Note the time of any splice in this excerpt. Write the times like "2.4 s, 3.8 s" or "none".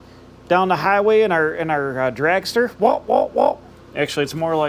3.8 s